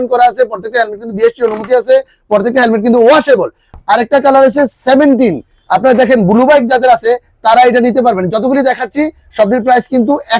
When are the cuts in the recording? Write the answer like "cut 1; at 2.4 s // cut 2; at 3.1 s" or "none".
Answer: cut 1; at 3.6 s